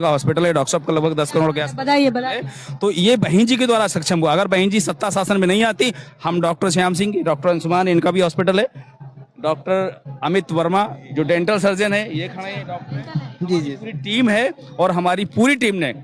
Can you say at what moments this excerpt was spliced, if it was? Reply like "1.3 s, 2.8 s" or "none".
none